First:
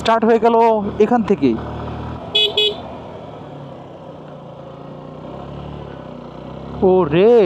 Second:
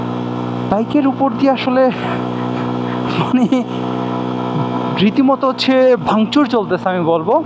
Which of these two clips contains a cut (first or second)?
first